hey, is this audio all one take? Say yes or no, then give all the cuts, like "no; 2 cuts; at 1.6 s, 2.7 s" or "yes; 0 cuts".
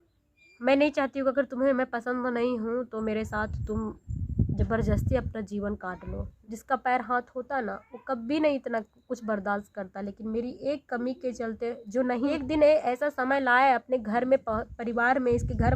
no; 2 cuts; at 6.3 s, 12.3 s